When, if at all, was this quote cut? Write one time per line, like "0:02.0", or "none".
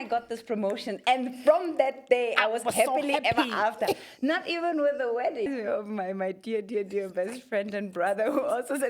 0:05.5